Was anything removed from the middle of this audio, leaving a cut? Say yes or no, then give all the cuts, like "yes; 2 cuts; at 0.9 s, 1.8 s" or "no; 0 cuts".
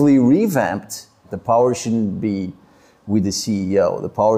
yes; 1 cut; at 1.3 s